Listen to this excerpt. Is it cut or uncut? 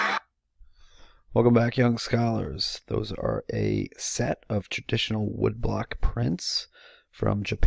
cut